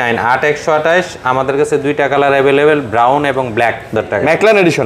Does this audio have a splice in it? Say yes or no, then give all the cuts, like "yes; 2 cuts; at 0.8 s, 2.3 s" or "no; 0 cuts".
yes; 1 cut; at 3.9 s